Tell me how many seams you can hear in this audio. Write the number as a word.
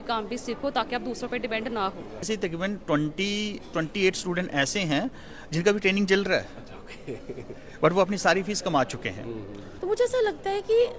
two